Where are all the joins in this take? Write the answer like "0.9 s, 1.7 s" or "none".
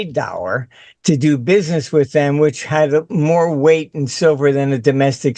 none